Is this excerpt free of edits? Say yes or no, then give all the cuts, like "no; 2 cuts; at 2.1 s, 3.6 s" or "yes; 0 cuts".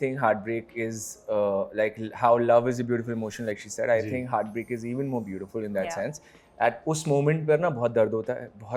yes; 0 cuts